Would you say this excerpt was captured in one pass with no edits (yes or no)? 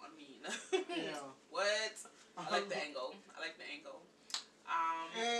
yes